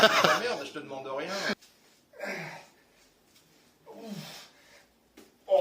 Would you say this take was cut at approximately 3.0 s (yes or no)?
no